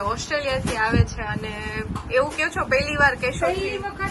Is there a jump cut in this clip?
no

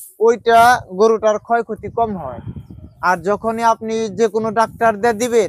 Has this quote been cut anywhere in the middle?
no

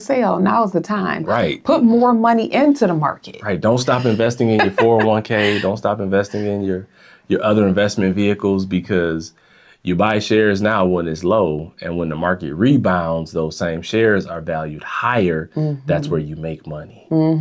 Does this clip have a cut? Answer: no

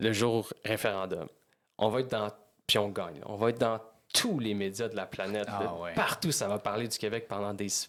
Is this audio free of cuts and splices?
yes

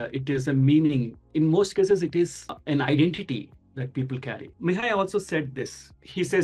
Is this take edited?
yes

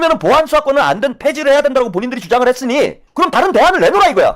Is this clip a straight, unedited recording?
no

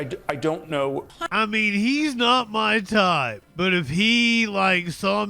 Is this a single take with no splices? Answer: no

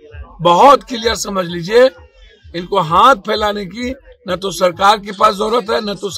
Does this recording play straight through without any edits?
yes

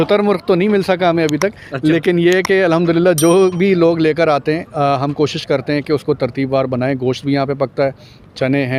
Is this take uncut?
yes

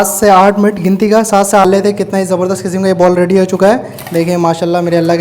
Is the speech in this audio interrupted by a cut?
yes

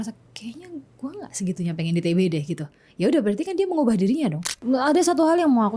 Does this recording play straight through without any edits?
no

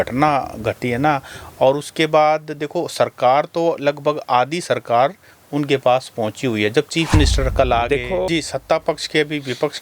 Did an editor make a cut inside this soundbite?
yes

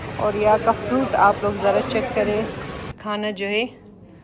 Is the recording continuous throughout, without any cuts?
no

